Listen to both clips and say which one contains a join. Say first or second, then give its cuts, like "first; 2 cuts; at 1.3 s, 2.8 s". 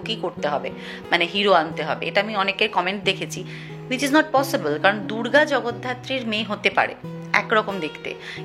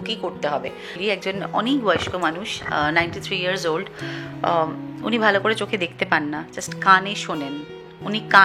second; 1 cut; at 1.0 s